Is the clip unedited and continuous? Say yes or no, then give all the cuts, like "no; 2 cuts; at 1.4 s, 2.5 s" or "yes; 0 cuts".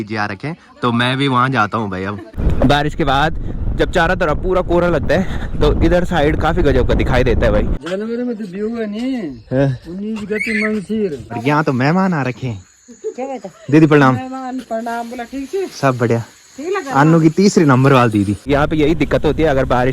no; 4 cuts; at 2.3 s, 7.7 s, 11.2 s, 18.4 s